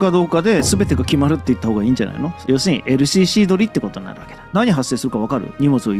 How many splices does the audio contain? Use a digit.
2